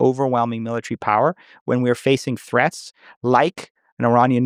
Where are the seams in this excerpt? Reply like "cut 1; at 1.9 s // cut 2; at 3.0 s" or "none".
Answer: none